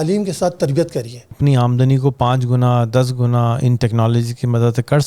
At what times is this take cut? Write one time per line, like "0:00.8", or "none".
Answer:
0:01.3

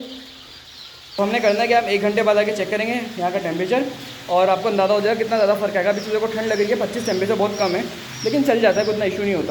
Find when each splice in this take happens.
0:01.2

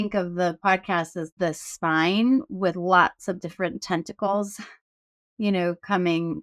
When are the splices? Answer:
0:01.3

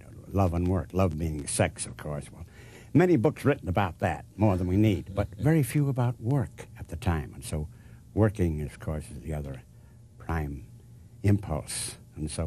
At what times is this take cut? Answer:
none

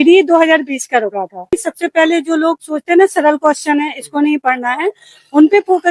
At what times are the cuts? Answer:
0:01.5

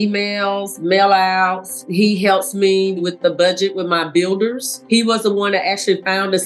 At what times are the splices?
0:01.8
0:03.0
0:04.7

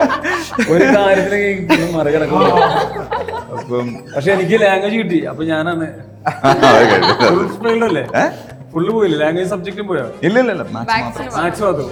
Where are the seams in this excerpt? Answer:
none

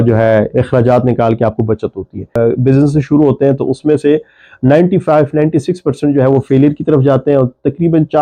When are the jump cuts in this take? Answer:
0:02.4

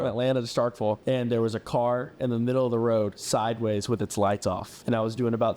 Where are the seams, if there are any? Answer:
0:01.0
0:04.7

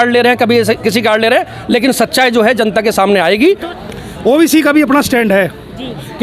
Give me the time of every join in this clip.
0:03.7

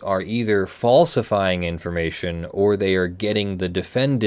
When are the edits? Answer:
none

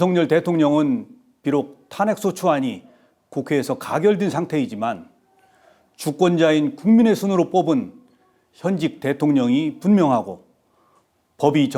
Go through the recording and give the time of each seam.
none

